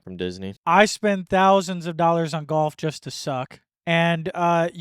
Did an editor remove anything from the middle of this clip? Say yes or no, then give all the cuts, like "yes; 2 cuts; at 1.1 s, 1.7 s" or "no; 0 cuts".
yes; 1 cut; at 3.6 s